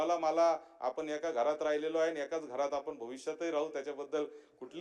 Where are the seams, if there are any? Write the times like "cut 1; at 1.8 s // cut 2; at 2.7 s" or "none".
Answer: none

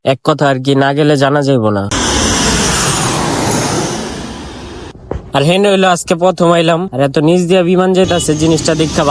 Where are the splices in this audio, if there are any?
cut 1; at 1.9 s

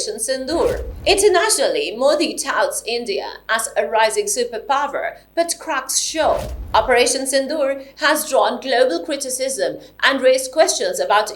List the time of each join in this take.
cut 1; at 0.9 s // cut 2; at 6.5 s

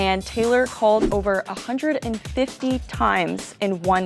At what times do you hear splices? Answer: cut 1; at 1.1 s

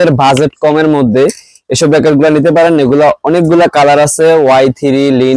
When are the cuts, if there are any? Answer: cut 1; at 2.1 s

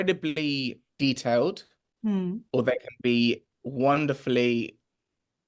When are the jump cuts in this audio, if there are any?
cut 1; at 3.6 s

